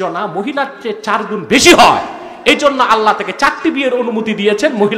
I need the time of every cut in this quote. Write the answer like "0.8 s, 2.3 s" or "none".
none